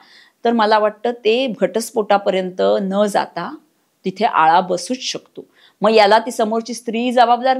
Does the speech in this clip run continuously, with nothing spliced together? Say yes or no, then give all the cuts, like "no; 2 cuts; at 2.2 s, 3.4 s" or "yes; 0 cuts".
yes; 0 cuts